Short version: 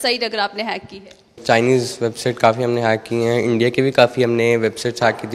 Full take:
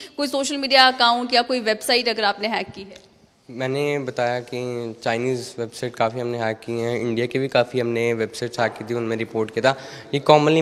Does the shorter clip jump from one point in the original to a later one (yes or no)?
yes